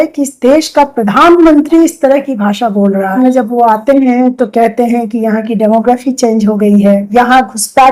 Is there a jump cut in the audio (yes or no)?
yes